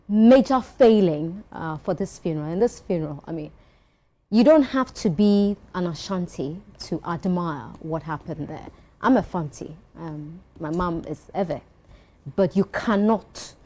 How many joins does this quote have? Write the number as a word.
zero